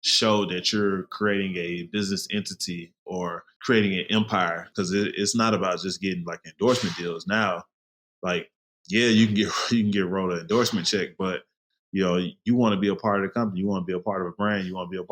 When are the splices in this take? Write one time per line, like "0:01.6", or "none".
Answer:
0:03.5
0:04.7